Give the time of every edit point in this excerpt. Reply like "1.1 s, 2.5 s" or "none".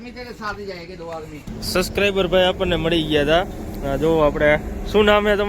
1.4 s